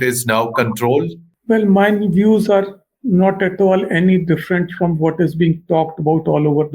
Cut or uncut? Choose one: cut